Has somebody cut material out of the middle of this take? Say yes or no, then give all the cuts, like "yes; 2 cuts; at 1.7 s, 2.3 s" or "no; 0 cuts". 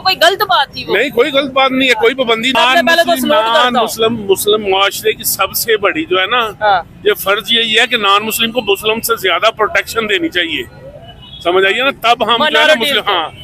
yes; 1 cut; at 2.5 s